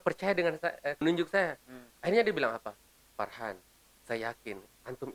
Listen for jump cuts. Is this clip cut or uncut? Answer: cut